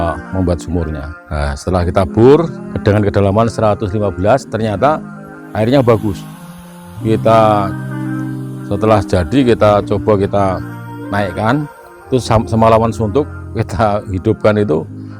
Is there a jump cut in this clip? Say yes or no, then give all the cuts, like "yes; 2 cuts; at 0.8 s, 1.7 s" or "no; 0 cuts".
yes; 2 cuts; at 1.1 s, 2.6 s